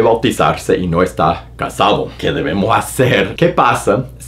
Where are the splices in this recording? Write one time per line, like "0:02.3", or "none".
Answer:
0:02.2
0:03.3